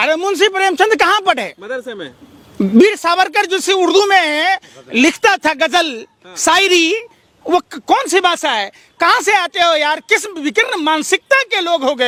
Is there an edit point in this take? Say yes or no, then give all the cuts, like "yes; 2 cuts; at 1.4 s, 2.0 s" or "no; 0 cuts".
no; 0 cuts